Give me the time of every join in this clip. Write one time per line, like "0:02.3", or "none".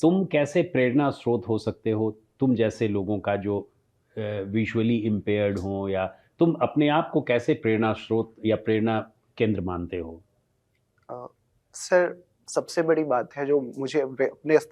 none